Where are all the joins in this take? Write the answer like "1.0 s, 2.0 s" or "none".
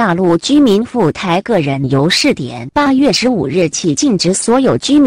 2.9 s